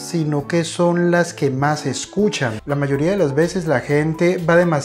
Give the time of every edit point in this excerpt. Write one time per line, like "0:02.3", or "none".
0:02.5

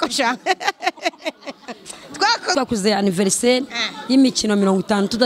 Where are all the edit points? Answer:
0:02.5

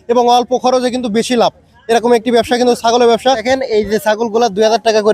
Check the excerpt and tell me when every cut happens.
0:03.4

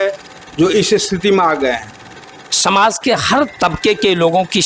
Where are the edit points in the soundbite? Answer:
0:02.2

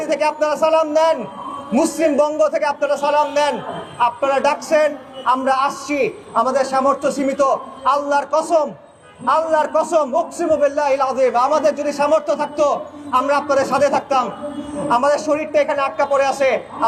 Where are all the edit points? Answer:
none

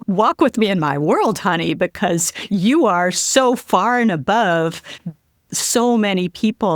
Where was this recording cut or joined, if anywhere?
none

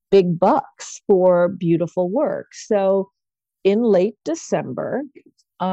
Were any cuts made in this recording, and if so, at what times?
none

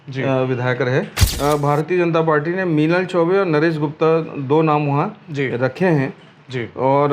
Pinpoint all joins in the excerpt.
0:01.2

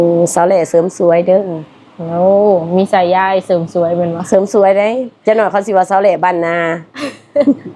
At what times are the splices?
none

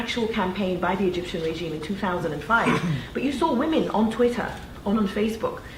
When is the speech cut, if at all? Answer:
0:02.8

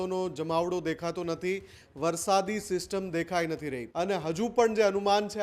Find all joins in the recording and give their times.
0:03.8

